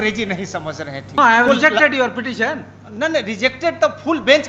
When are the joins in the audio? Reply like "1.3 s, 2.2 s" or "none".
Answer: 1.2 s